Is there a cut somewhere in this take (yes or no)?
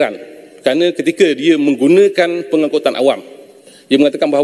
no